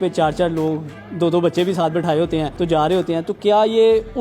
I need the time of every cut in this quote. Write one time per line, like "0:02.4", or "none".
0:02.5